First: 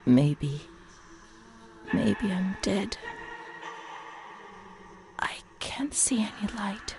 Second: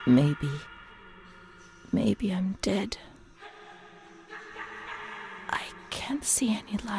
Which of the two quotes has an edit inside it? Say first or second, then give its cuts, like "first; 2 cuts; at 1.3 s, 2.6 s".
first; 2 cuts; at 3.0 s, 5.1 s